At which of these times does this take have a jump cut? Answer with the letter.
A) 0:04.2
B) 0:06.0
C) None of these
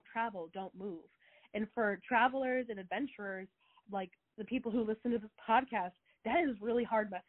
C